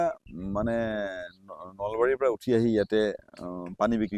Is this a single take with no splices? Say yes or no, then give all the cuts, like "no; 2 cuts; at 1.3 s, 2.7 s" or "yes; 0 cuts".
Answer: yes; 0 cuts